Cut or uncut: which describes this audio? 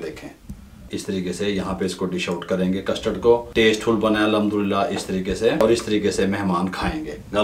cut